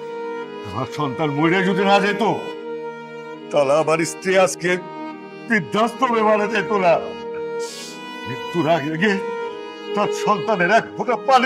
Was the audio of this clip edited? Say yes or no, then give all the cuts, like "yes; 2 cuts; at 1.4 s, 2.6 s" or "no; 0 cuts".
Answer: no; 0 cuts